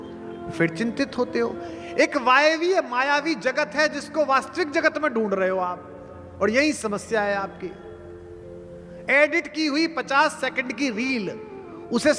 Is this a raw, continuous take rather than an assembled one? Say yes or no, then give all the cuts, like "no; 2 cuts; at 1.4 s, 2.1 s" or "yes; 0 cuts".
yes; 0 cuts